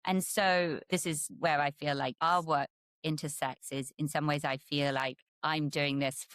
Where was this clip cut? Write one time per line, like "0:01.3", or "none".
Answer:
0:00.9
0:02.2
0:05.3